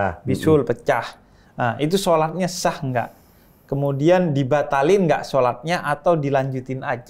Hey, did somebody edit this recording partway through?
no; 0 cuts

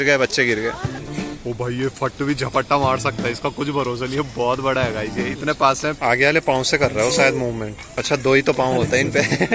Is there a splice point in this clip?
yes; 3 cuts; at 1.0 s, 6.0 s, 7.9 s

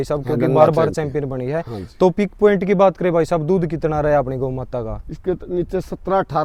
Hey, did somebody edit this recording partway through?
no; 0 cuts

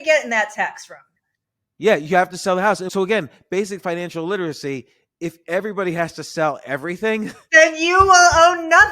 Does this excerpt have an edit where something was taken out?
yes; 2 cuts; at 2.9 s, 7.5 s

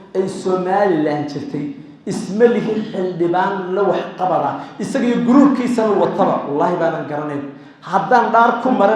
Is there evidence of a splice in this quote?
no; 0 cuts

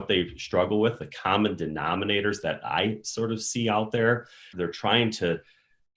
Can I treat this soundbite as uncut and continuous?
no; 1 cut; at 4.5 s

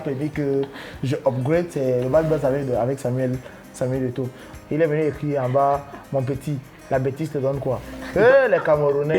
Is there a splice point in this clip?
yes; 1 cut; at 4.4 s

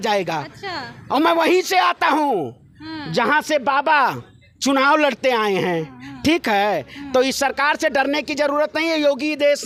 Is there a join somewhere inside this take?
no; 0 cuts

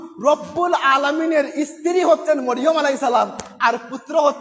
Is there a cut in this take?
no; 0 cuts

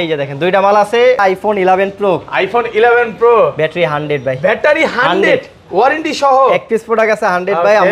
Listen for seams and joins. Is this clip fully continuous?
no; 1 cut; at 1.3 s

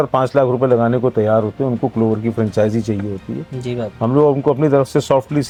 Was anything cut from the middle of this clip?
no; 0 cuts

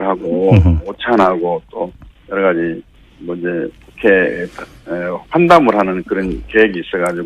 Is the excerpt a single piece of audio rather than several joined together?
no; 1 cut; at 2.6 s

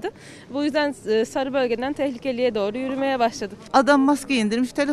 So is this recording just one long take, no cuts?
no; 1 cut; at 3.6 s

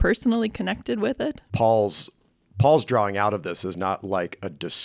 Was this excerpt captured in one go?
no; 1 cut; at 1.4 s

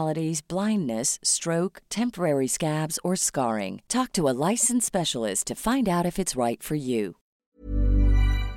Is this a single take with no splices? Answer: no; 1 cut; at 7.3 s

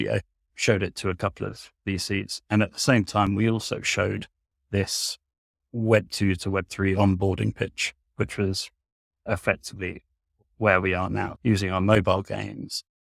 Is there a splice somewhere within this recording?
no; 0 cuts

